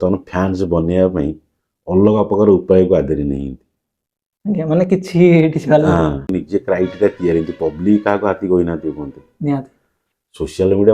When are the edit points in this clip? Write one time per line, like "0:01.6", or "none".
0:06.3